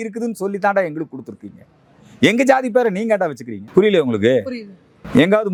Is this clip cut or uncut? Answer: uncut